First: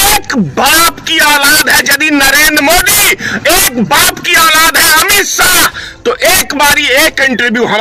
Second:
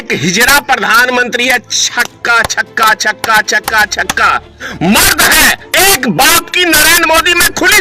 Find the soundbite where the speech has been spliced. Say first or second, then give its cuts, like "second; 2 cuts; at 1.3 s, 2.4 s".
second; 1 cut; at 4.6 s